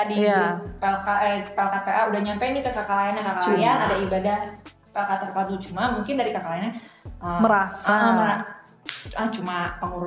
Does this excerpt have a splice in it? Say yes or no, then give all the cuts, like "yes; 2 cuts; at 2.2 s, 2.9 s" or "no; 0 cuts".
no; 0 cuts